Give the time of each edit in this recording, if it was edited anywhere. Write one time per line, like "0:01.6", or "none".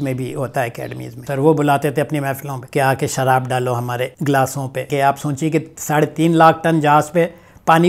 0:01.3
0:02.5
0:04.2
0:04.9

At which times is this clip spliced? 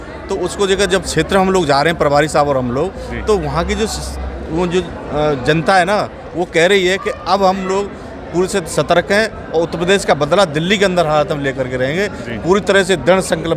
none

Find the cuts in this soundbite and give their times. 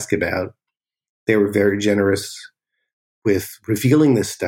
0:03.0

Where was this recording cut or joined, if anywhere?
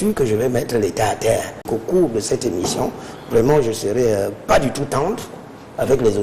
0:01.7

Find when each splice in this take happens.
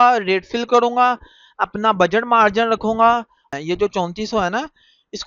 0:03.4

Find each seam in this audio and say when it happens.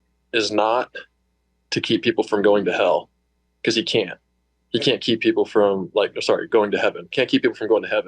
none

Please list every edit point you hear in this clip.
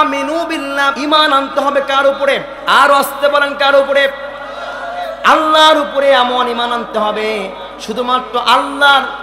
0:01.0

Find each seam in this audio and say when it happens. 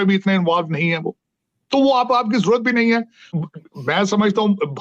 0:03.3

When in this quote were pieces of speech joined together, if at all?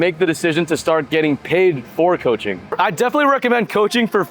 none

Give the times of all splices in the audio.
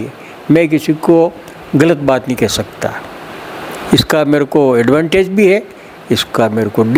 none

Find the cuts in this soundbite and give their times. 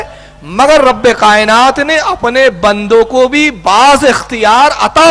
none

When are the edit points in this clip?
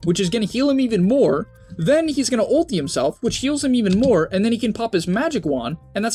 none

